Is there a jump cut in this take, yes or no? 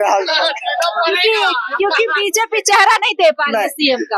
no